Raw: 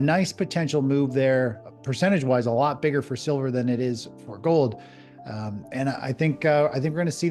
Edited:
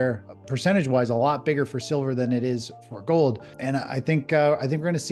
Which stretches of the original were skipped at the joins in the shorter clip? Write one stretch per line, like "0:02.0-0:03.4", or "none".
0:04.9-0:05.6